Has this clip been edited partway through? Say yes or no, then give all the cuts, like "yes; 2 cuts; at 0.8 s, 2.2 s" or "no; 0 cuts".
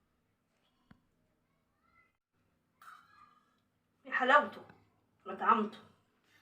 yes; 1 cut; at 2.3 s